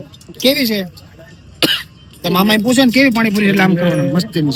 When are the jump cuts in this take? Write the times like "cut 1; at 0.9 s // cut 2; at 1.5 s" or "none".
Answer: none